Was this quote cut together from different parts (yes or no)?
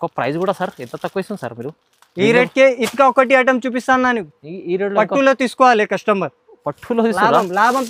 no